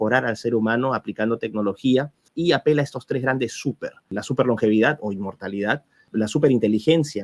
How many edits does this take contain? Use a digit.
3